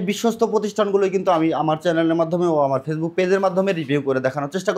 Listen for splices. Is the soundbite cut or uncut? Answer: uncut